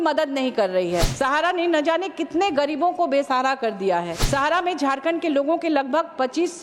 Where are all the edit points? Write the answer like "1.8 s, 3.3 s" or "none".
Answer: 1.1 s, 4.2 s